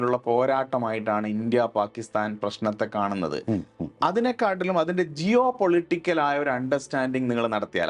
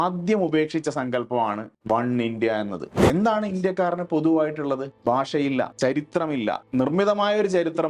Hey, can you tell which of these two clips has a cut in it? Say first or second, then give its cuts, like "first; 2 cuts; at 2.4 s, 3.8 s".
second; 5 cuts; at 1.7 s, 2.9 s, 4.9 s, 5.7 s, 6.6 s